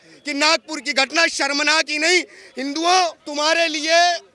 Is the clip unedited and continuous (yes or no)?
no